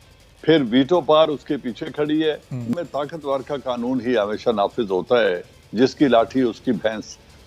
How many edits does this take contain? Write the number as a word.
one